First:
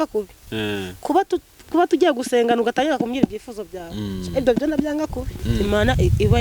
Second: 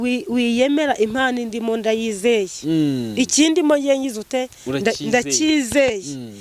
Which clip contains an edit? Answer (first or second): first